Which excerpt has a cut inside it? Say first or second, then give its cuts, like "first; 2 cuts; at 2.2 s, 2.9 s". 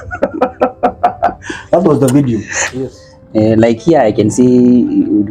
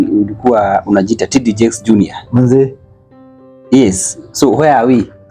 first; 1 cut; at 3.1 s